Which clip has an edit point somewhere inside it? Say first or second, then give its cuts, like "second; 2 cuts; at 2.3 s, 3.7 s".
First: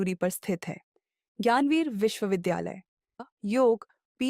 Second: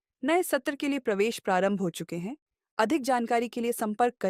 first; 1 cut; at 3.2 s